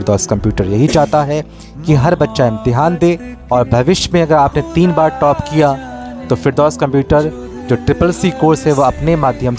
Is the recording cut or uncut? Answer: cut